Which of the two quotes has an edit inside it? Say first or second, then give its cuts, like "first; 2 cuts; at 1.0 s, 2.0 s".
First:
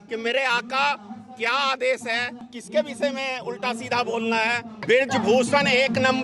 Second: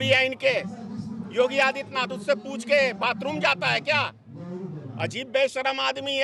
first; 2 cuts; at 2.5 s, 4.8 s